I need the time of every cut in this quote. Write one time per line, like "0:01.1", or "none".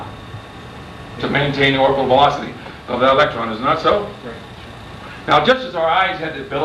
0:03.9